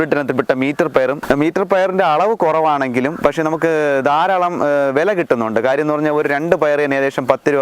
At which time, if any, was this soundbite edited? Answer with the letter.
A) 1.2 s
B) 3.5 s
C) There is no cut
A